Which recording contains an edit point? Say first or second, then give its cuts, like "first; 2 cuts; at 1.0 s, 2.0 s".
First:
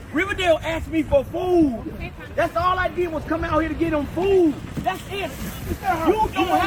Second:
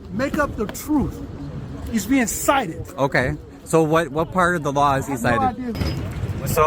second; 1 cut; at 5.7 s